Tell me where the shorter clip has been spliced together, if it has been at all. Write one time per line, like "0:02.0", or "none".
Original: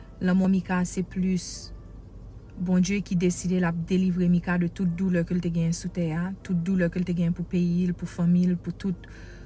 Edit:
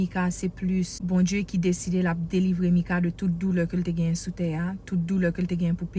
0:01.0